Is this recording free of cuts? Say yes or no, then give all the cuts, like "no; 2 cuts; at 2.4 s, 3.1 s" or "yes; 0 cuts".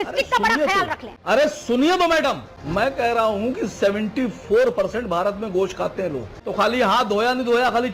no; 1 cut; at 6.3 s